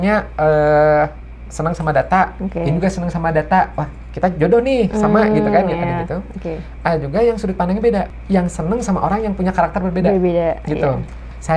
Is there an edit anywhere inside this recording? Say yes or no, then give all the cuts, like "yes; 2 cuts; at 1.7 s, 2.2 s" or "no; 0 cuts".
yes; 1 cut; at 8.2 s